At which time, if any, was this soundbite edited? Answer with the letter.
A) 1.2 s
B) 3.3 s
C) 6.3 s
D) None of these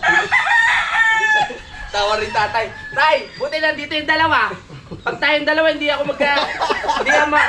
D